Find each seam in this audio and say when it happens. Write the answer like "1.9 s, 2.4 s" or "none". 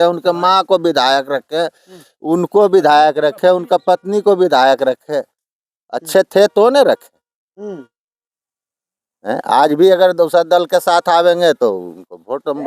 none